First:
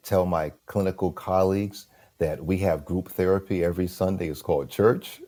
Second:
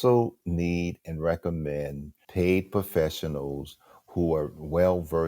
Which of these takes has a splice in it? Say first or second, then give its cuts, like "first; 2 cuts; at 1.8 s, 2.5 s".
second; 1 cut; at 2.2 s